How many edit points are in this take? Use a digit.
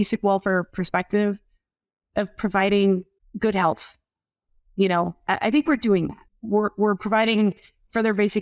2